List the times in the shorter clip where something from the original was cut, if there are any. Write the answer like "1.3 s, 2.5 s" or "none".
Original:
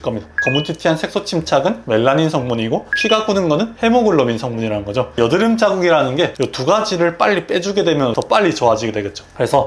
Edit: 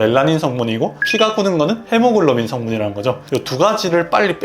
3.2 s